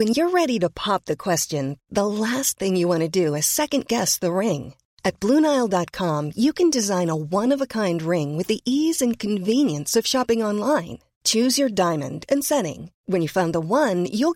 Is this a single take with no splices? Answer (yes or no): yes